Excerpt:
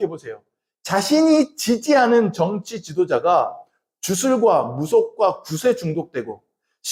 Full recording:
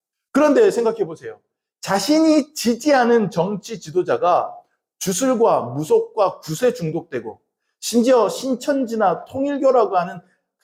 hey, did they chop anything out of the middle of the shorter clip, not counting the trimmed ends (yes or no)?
no